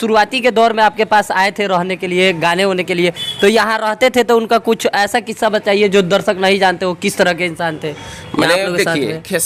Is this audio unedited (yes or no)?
yes